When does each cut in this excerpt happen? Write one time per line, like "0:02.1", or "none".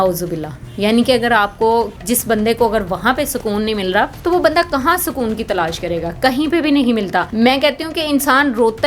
0:02.0
0:04.2
0:07.3